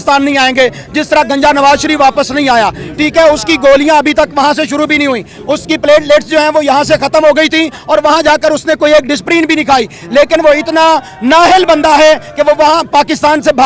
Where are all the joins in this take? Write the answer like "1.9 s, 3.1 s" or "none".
none